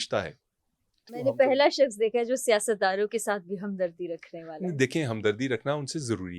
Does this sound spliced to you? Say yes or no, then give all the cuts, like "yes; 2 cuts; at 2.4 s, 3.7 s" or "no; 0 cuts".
yes; 1 cut; at 1.1 s